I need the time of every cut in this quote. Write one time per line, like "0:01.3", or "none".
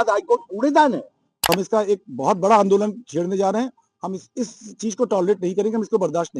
0:01.3

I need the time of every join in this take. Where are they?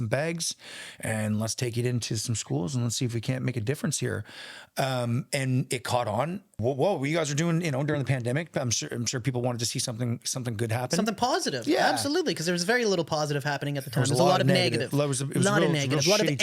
0:06.5

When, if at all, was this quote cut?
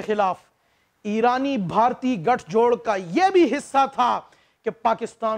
none

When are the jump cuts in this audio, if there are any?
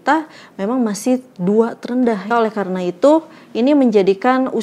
0:02.3

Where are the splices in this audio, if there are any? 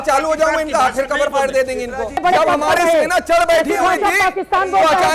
0:02.2

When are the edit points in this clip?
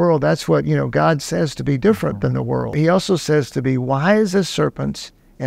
0:02.7

